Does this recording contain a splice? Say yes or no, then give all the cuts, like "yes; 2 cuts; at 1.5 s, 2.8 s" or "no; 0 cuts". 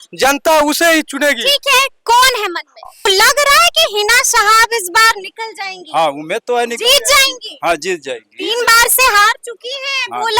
yes; 1 cut; at 3.1 s